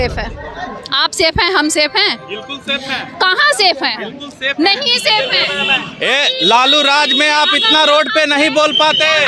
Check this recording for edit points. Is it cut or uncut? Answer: uncut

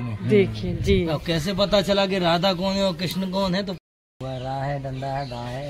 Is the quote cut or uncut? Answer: cut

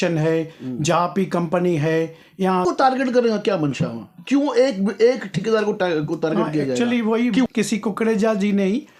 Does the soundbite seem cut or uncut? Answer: cut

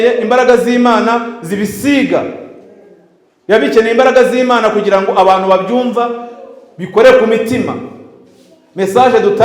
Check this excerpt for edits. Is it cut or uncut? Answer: uncut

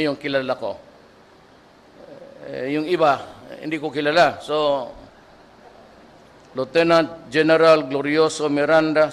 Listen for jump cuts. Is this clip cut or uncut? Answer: cut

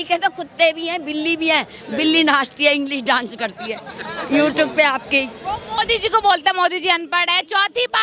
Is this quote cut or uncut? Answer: uncut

